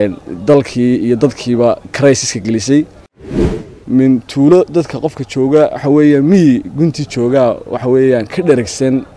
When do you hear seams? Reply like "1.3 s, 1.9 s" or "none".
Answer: 3.4 s